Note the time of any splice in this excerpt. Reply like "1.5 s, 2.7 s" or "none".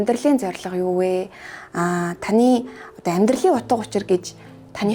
none